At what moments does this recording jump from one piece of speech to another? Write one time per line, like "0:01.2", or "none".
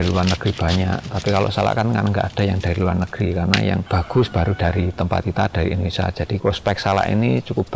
0:03.9
0:06.4